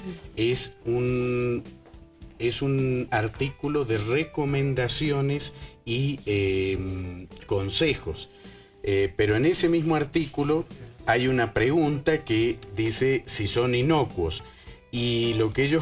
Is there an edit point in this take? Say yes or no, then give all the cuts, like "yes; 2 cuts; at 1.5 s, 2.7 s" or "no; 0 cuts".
yes; 1 cut; at 1.4 s